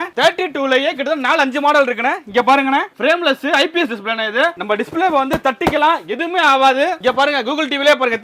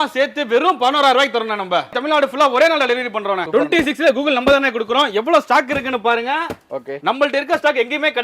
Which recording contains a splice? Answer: second; 2 cuts; at 2.0 s, 3.4 s

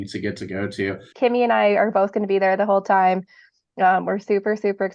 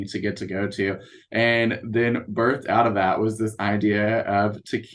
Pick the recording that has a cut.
first; 1 cut; at 1.1 s

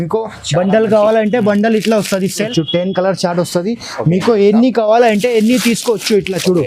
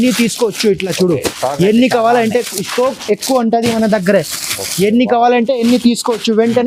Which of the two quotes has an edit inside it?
first; 1 cut; at 2.5 s

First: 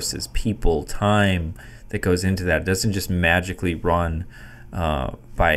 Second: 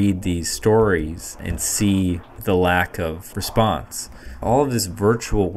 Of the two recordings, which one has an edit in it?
second; 4 cuts; at 1.6 s, 2.3 s, 3.2 s, 4.2 s

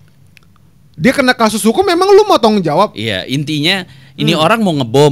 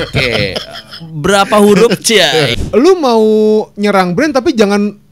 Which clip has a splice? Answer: second; 1 cut; at 2.6 s

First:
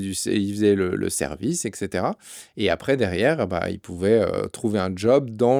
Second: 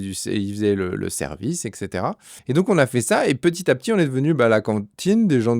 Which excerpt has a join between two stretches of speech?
second; 1 cut; at 2.3 s

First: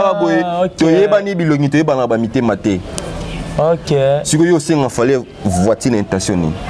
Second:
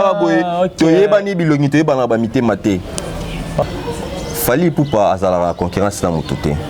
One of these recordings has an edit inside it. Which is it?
second; 1 cut; at 3.6 s

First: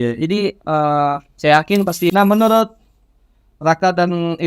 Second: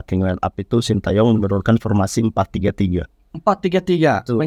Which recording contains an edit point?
first; 1 cut; at 2.1 s

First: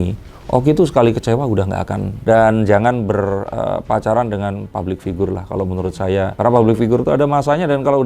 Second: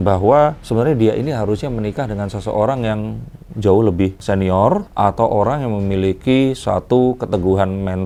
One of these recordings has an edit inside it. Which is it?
first; 2 cuts; at 2.1 s, 6.4 s

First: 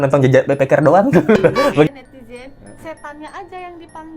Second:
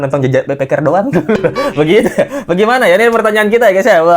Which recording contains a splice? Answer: first; 1 cut; at 1.9 s

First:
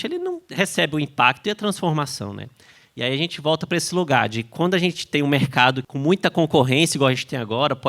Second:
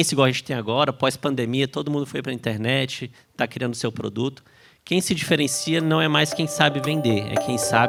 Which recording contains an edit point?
first; 1 cut; at 5.9 s

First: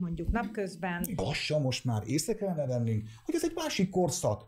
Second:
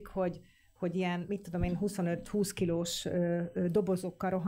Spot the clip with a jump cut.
first; 1 cut; at 1.2 s

